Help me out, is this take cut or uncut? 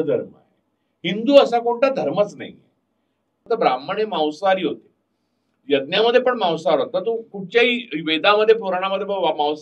cut